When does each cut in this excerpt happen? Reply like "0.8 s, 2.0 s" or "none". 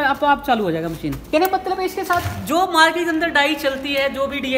1.2 s